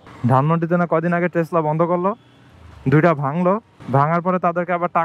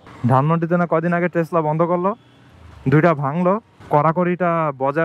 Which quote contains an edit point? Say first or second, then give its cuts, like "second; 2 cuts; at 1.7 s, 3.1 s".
second; 1 cut; at 3.7 s